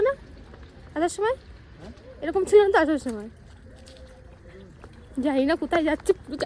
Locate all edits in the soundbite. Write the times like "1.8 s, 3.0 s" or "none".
none